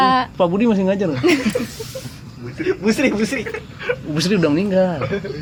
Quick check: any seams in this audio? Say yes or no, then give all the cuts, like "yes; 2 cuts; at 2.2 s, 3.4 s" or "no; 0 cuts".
no; 0 cuts